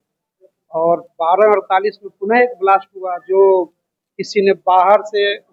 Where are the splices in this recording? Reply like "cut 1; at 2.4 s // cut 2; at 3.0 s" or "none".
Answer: none